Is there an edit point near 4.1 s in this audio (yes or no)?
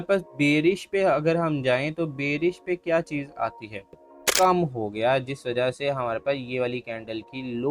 yes